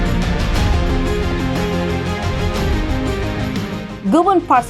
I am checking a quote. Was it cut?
no; 0 cuts

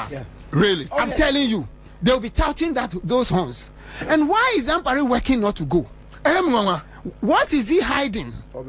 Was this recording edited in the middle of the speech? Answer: no; 0 cuts

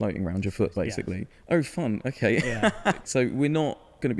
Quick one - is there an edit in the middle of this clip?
yes; 1 cut; at 3.0 s

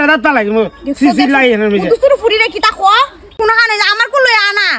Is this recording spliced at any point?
yes; 1 cut; at 3.3 s

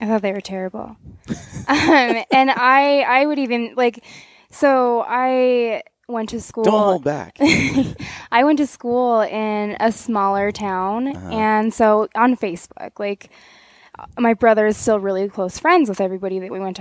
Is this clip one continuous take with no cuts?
yes; 0 cuts

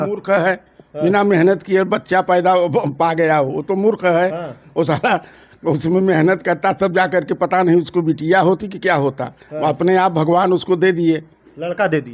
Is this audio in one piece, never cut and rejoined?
yes; 0 cuts

